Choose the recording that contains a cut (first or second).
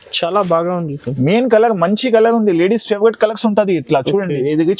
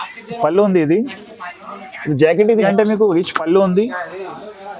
second